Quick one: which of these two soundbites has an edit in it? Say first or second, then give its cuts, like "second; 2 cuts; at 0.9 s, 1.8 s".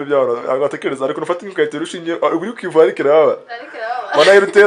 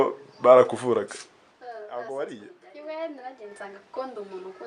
second; 1 cut; at 1.8 s